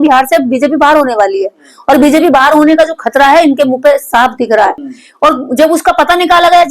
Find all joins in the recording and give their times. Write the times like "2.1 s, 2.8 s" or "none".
4.8 s